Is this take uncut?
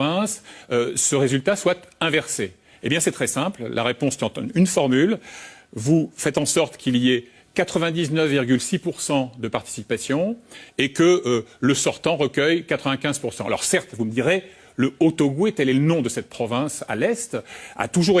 yes; 0 cuts

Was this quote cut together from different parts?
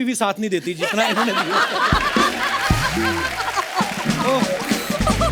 no; 0 cuts

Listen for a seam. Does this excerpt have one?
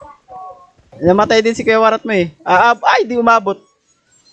yes; 1 cut; at 0.9 s

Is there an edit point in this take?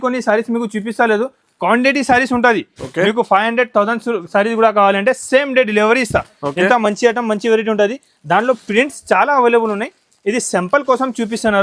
no; 0 cuts

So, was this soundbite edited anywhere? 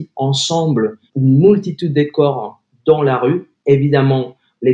yes; 1 cut; at 1.0 s

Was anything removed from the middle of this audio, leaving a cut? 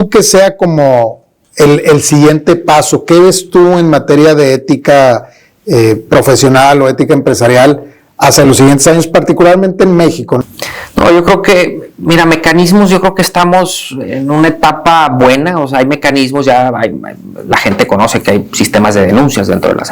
yes; 1 cut; at 10.4 s

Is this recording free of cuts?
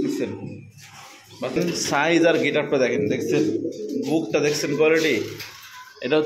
no; 1 cut; at 1.5 s

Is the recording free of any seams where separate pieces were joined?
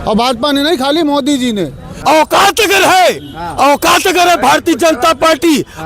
no; 1 cut; at 1.9 s

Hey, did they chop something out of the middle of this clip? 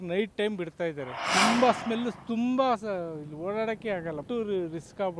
yes; 2 cuts; at 1.3 s, 4.2 s

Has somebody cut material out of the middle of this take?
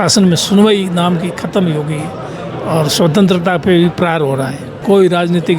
yes; 1 cut; at 4.7 s

